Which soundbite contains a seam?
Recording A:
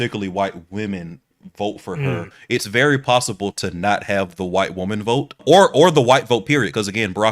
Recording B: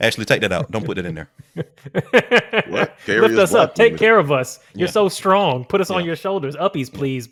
A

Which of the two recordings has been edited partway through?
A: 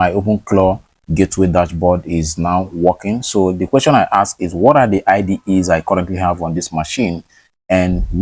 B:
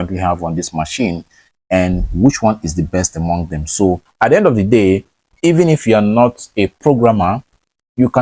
B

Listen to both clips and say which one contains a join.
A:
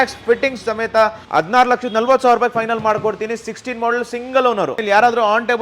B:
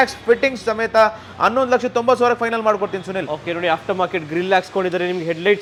A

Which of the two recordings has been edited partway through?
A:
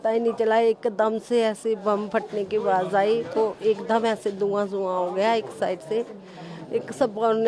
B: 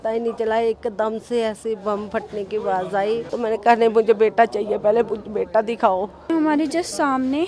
B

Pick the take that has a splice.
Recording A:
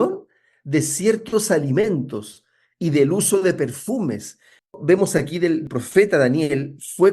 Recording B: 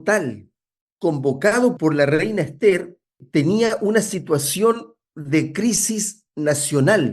A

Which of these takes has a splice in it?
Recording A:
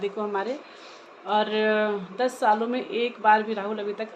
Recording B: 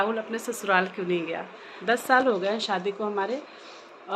B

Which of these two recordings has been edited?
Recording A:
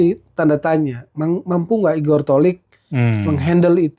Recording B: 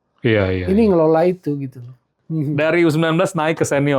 B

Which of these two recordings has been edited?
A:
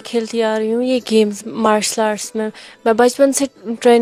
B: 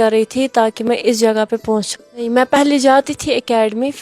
B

